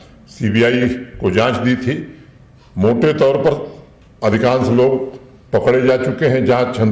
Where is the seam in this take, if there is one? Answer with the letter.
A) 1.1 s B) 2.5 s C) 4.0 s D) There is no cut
D